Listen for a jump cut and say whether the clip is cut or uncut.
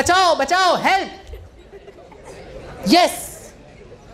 uncut